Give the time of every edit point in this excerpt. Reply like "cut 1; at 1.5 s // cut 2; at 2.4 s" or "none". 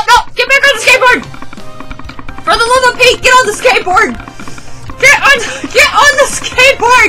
none

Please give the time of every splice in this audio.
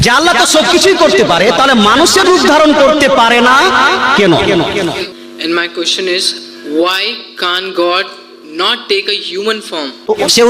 cut 1; at 5.0 s

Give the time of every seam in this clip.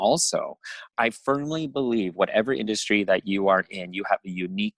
cut 1; at 0.9 s

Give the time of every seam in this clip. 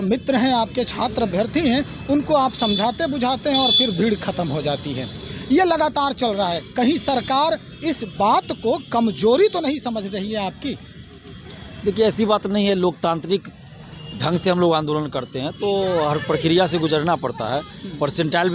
none

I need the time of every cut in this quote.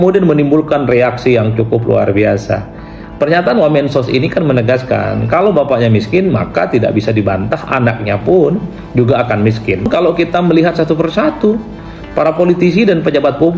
cut 1; at 9.9 s

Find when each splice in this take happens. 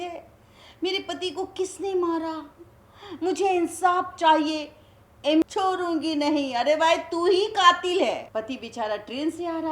cut 1; at 5.4 s // cut 2; at 8.3 s

